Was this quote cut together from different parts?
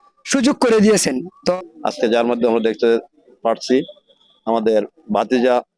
yes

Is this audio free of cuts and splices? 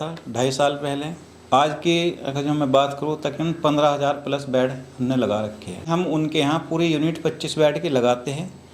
no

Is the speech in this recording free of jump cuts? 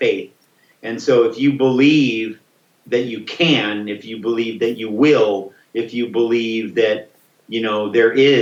yes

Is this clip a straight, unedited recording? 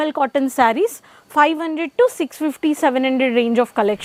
yes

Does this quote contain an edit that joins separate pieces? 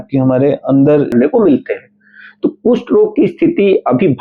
yes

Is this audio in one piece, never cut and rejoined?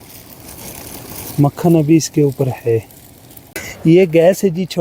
yes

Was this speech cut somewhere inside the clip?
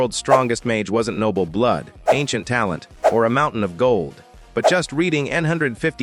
no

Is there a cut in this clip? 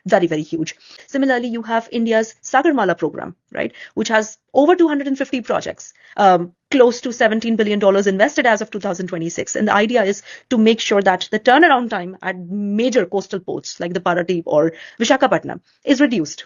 yes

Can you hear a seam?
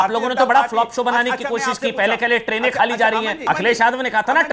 yes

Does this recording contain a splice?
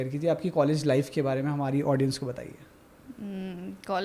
no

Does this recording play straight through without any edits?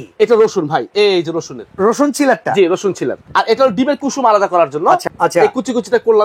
no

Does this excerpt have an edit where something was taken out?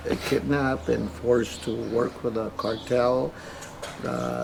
no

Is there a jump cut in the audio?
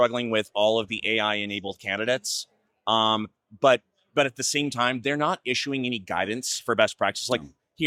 no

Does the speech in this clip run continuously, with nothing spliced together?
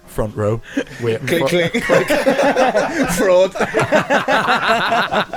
yes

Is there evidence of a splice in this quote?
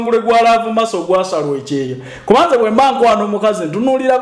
no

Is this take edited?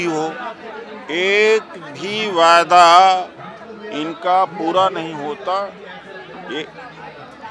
no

